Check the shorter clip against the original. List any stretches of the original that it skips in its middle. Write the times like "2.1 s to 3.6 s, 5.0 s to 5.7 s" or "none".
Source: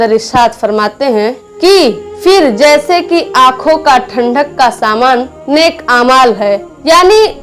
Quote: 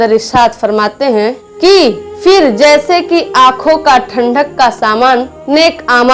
none